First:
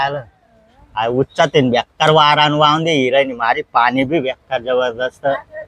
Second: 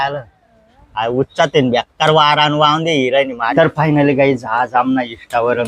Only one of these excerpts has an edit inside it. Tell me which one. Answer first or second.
second